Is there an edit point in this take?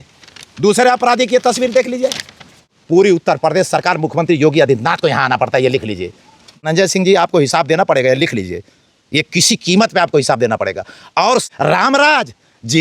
yes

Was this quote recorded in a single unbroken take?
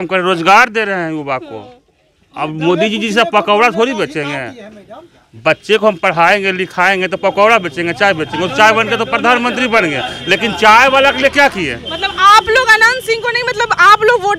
yes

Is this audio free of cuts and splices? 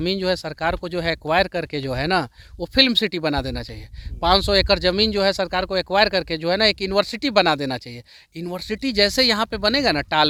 yes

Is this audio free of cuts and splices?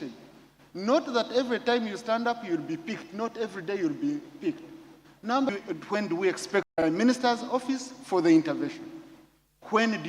no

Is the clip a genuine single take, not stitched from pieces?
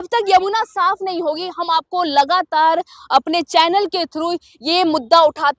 yes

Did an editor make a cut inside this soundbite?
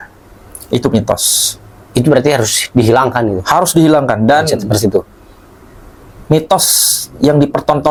no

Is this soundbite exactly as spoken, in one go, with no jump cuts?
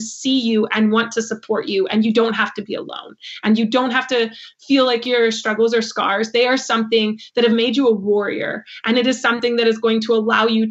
yes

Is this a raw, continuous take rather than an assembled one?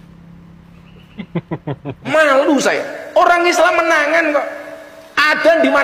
no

